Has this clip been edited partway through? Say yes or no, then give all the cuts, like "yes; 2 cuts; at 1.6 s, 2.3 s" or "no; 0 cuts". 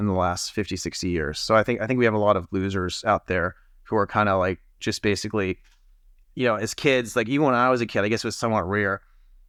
no; 0 cuts